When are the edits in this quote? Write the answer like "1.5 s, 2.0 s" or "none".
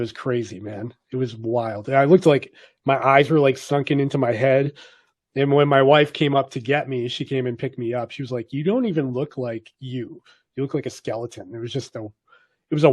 none